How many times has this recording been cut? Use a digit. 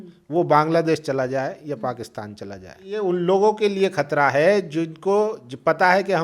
1